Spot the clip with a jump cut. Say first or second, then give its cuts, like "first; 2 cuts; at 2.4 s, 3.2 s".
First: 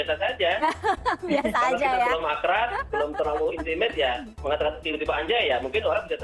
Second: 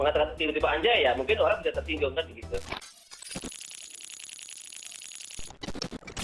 second; 1 cut; at 2.7 s